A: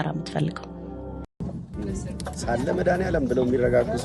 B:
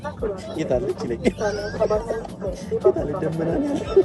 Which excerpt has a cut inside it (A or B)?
A